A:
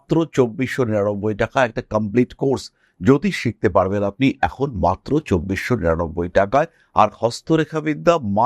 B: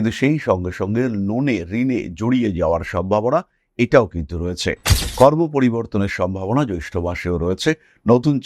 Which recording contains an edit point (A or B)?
B